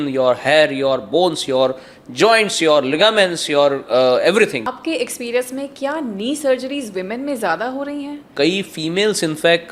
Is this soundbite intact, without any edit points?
no; 2 cuts; at 4.7 s, 8.3 s

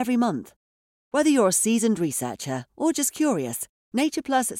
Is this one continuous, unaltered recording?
yes; 0 cuts

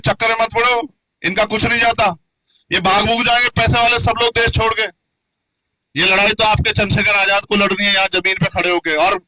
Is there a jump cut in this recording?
no; 0 cuts

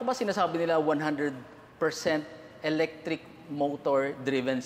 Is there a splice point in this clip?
no; 0 cuts

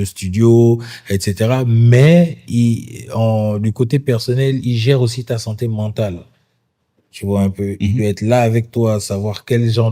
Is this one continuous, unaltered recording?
yes; 0 cuts

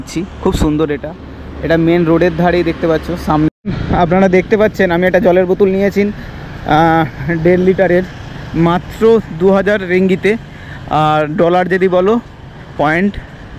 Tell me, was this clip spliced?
yes; 1 cut; at 3.5 s

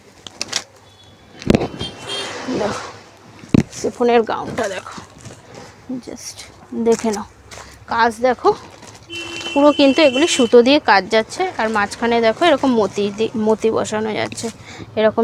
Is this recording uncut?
yes; 0 cuts

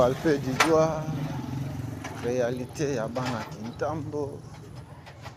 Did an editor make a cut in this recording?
no; 0 cuts

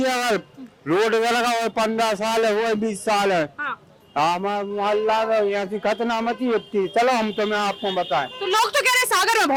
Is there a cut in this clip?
no; 0 cuts

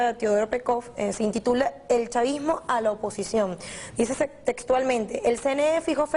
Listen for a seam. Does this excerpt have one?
yes; 1 cut; at 4.6 s

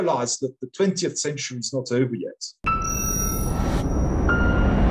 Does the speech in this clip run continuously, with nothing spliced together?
no; 1 cut; at 2.5 s

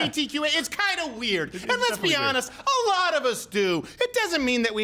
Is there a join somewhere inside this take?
no; 0 cuts

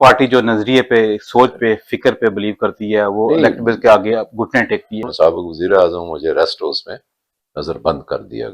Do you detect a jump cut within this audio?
yes; 1 cut; at 5.0 s

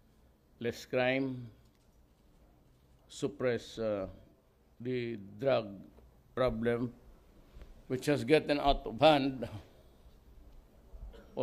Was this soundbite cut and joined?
no; 0 cuts

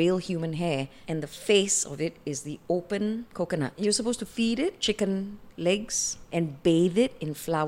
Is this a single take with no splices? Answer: yes; 0 cuts

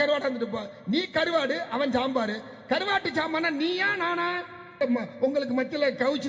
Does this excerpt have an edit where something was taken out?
yes; 1 cut; at 4.8 s

